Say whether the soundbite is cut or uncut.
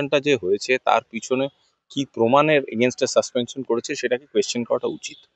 uncut